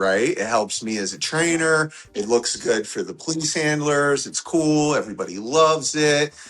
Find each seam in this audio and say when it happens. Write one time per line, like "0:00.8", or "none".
none